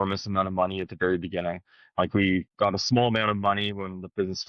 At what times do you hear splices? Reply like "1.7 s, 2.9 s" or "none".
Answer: 2.5 s

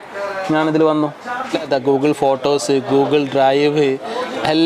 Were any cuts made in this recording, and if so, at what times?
1.6 s

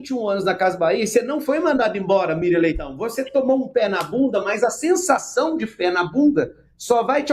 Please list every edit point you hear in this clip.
none

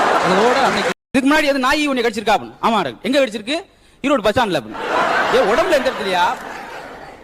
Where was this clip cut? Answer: 1.0 s

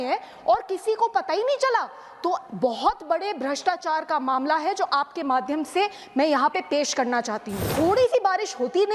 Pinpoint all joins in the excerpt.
7.7 s

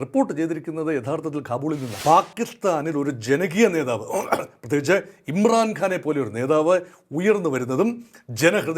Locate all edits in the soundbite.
1.9 s

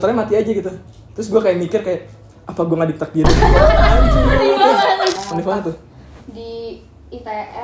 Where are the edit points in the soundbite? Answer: 5.1 s

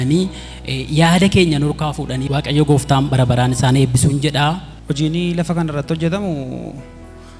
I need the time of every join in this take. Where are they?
2.2 s, 4.8 s

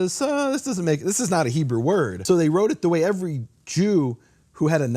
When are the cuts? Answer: 2.2 s

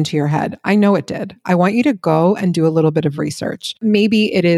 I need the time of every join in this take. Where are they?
1.4 s, 3.8 s

